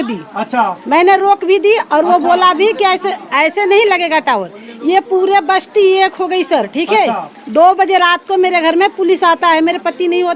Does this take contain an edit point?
no; 0 cuts

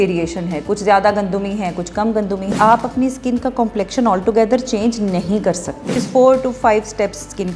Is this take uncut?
no; 2 cuts; at 2.5 s, 6.0 s

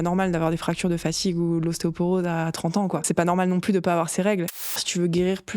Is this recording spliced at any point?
yes; 2 cuts; at 3.0 s, 4.7 s

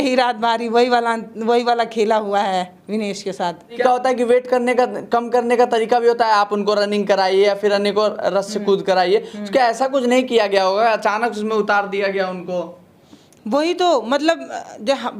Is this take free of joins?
no; 1 cut; at 3.8 s

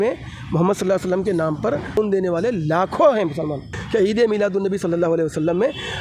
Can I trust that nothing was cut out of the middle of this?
no; 2 cuts; at 2.0 s, 3.7 s

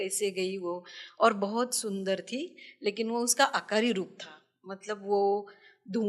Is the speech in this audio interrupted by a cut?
no; 0 cuts

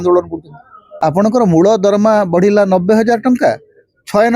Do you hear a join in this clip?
yes; 1 cut; at 1.3 s

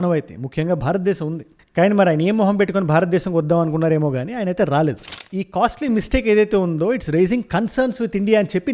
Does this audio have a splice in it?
yes; 1 cut; at 5.1 s

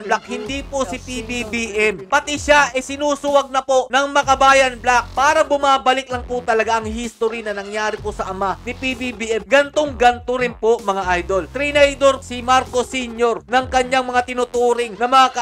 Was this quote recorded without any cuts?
no; 2 cuts; at 2.0 s, 5.1 s

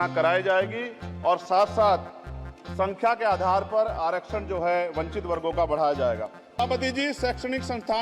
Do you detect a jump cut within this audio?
yes; 1 cut; at 6.6 s

